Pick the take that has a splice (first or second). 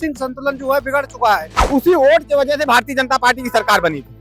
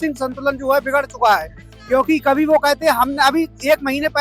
first